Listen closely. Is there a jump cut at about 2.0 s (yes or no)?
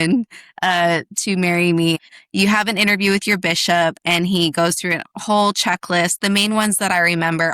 yes